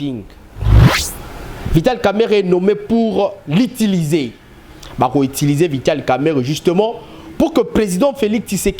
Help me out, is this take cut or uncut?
cut